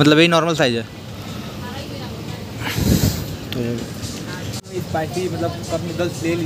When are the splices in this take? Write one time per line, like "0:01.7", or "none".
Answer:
0:01.1
0:04.7